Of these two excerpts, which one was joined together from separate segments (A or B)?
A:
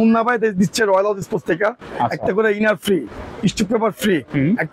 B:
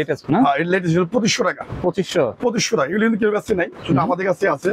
A